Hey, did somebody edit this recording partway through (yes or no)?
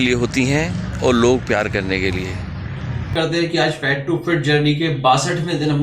yes